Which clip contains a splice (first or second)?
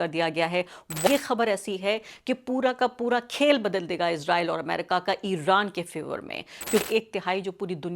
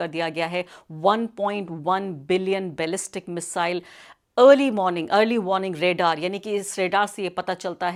first